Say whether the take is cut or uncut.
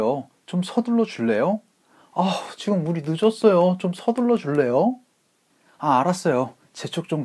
uncut